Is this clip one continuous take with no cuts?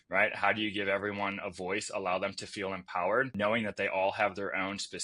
no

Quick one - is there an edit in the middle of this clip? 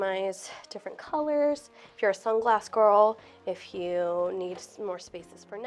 no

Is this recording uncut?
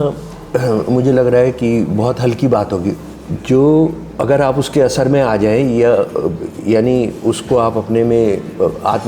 no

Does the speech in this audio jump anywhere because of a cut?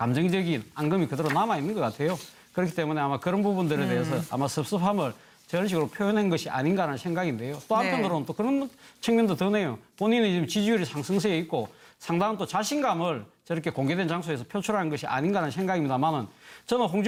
no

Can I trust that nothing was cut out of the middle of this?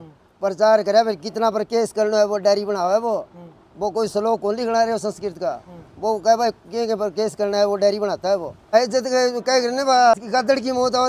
no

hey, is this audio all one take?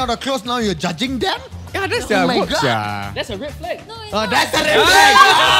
yes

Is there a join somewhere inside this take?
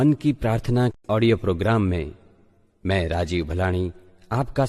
yes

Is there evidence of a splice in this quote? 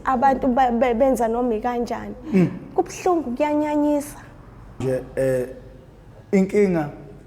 yes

